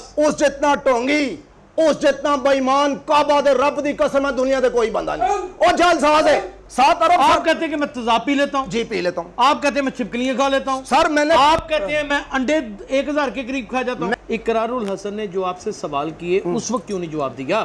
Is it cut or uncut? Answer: cut